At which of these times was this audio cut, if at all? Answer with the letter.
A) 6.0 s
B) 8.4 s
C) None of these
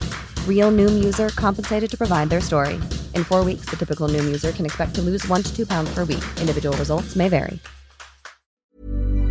B